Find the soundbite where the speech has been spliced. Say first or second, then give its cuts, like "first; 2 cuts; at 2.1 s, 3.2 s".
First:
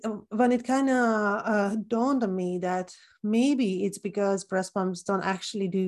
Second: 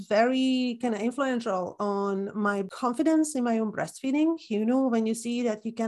second; 1 cut; at 2.7 s